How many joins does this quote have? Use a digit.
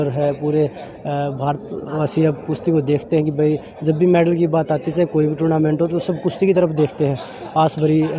0